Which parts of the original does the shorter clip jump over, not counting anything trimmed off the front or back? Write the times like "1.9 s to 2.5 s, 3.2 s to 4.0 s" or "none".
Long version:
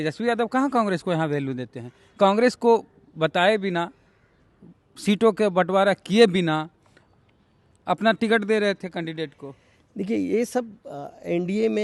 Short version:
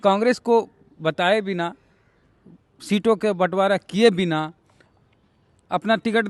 none